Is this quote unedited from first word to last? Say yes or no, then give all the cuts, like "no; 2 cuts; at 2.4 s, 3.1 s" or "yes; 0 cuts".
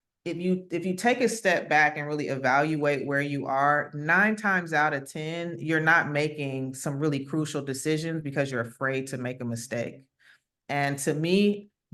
yes; 0 cuts